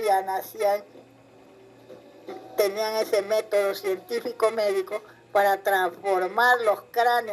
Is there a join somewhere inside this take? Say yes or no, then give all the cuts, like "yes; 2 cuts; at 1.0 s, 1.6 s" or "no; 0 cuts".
yes; 1 cut; at 5.4 s